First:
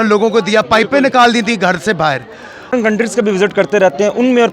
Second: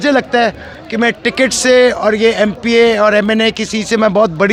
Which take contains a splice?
first; 1 cut; at 2.7 s

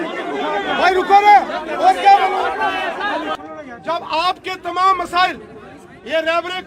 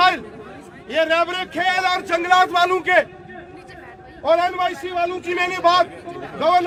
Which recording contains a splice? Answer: first; 1 cut; at 3.2 s

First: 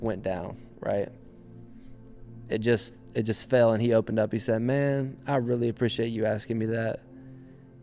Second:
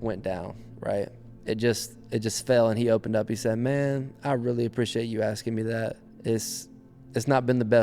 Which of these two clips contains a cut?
second; 2 cuts; at 1.3 s, 6.1 s

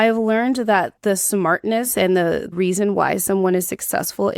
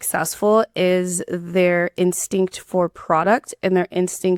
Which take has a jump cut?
first; 2 cuts; at 0.9 s, 2.5 s

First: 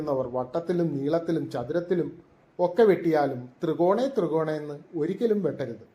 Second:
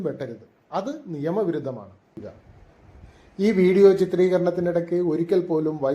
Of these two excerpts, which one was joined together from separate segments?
second; 1 cut; at 2.2 s

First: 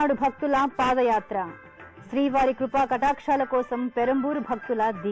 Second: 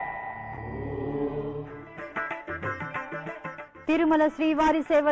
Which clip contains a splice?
second; 1 cut; at 3.7 s

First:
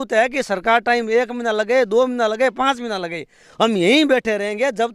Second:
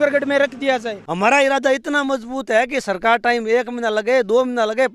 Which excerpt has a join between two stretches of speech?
second; 1 cut; at 1.0 s

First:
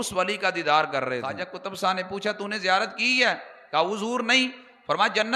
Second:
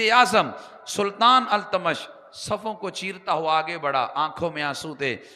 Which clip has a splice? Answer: first; 1 cut; at 1.4 s

